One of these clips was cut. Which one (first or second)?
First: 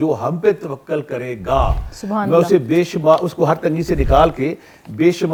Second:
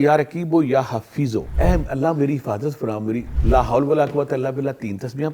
second